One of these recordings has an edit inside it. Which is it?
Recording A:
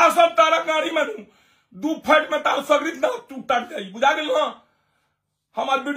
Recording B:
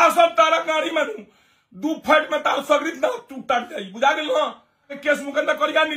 B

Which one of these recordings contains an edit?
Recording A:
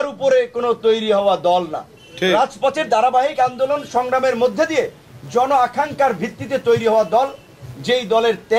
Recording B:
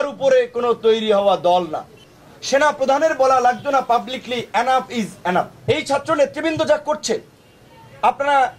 B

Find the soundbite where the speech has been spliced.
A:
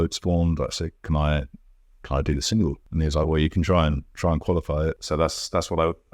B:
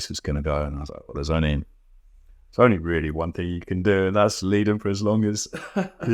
A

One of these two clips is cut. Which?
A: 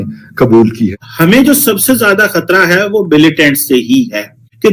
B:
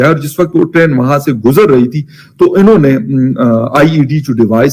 A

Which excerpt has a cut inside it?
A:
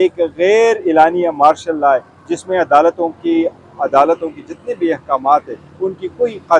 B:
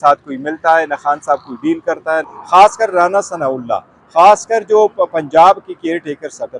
B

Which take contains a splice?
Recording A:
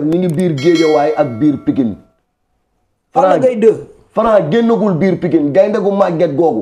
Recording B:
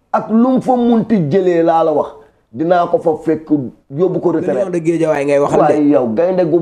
B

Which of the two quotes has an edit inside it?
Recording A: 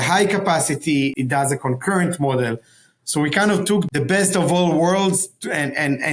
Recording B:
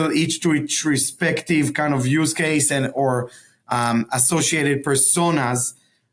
A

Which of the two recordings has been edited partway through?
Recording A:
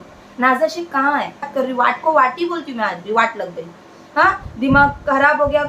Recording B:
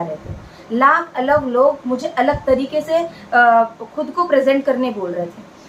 A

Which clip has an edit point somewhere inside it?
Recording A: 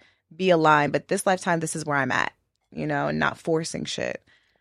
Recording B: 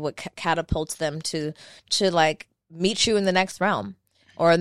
B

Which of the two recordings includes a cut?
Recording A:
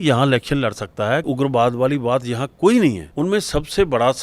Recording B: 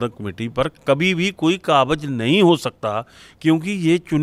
A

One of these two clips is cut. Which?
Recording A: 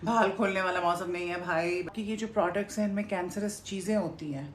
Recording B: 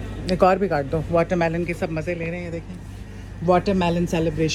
A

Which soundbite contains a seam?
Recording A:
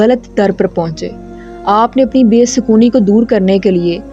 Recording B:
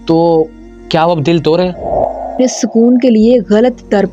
B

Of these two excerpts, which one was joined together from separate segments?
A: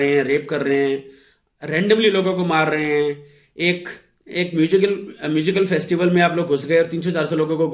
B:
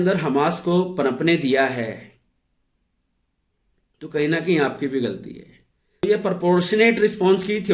B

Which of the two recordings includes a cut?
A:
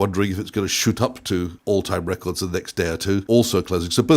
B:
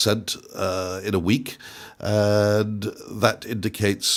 A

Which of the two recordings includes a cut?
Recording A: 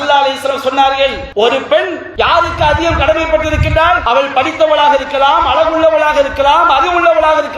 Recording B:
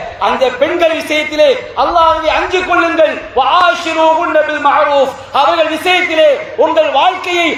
A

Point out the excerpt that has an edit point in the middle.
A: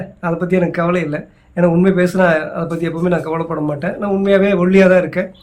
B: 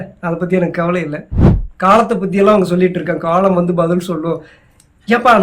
B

